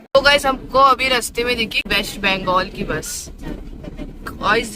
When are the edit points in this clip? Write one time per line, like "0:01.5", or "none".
0:01.9